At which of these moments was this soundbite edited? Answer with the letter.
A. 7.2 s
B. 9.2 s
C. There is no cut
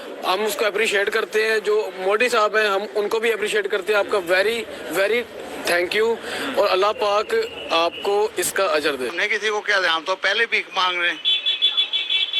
B